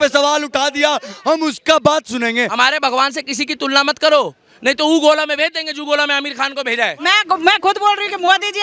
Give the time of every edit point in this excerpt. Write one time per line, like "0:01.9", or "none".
0:02.5
0:07.0